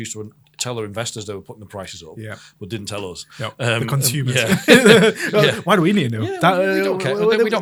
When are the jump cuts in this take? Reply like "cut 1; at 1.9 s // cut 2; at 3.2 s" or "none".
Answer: none